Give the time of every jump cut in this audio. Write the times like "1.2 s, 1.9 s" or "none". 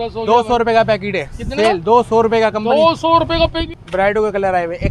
3.7 s